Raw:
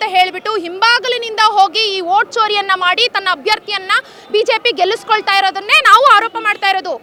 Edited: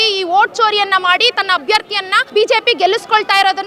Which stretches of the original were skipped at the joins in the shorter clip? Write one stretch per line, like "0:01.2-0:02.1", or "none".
0:03.9-0:04.1